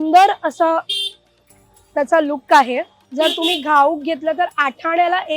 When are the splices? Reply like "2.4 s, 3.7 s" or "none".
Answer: 3.0 s